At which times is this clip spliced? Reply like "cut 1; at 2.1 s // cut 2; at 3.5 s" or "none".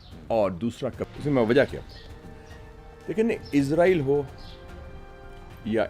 cut 1; at 1.0 s